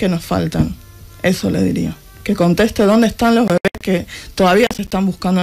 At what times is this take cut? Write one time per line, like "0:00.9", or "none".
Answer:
none